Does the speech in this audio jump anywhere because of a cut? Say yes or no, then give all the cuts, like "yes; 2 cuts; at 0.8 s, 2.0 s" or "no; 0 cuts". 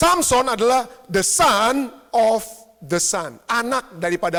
no; 0 cuts